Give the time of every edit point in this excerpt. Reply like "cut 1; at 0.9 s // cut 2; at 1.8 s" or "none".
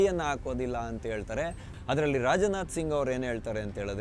cut 1; at 1.7 s

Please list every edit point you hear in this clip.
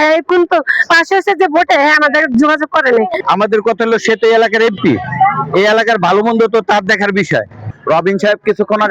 cut 1; at 3.2 s // cut 2; at 7.5 s

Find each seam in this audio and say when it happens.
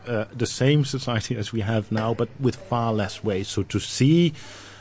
cut 1; at 3.5 s

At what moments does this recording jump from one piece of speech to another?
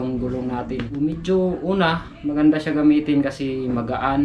cut 1; at 1.0 s

